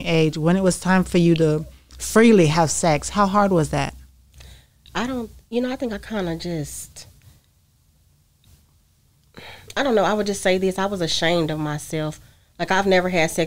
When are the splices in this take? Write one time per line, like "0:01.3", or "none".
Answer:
none